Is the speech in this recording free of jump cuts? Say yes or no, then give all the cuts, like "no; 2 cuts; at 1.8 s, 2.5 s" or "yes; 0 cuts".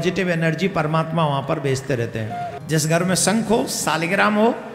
no; 1 cut; at 2.6 s